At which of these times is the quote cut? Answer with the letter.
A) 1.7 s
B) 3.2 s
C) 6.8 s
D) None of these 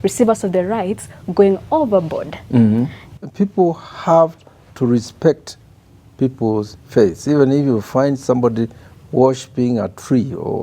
B